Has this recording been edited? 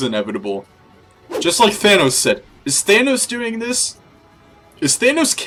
no; 0 cuts

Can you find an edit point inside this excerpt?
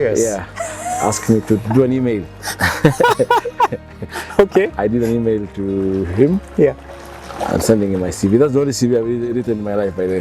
no; 0 cuts

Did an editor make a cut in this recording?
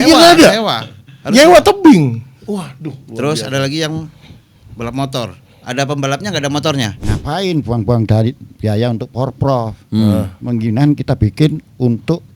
yes; 1 cut; at 7.0 s

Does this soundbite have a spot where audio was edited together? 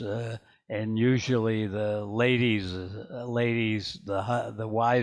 no; 0 cuts

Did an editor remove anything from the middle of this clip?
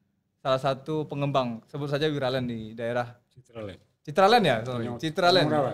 no; 0 cuts

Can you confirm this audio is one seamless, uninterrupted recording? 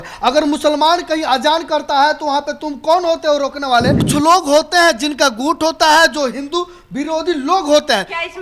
no; 1 cut; at 4.0 s

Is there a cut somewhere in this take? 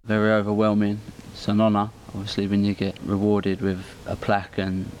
yes; 2 cuts; at 1.2 s, 3.0 s

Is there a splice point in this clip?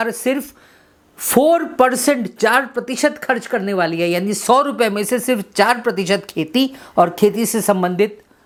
no; 0 cuts

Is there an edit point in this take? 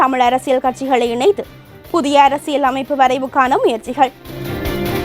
no; 0 cuts

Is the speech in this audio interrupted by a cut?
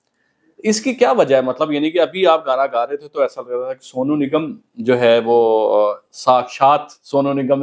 no; 0 cuts

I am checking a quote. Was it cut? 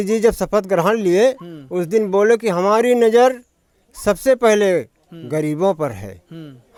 no; 0 cuts

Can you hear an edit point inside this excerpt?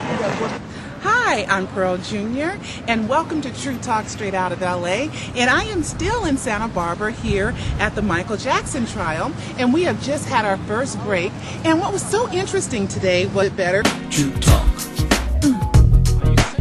no; 0 cuts

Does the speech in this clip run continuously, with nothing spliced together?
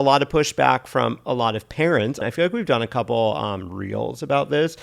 no; 1 cut; at 2.2 s

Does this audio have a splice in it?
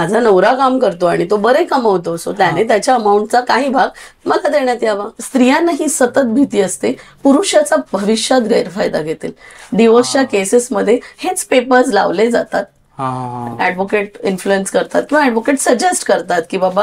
yes; 1 cut; at 5.1 s

